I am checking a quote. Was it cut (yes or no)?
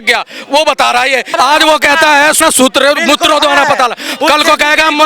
yes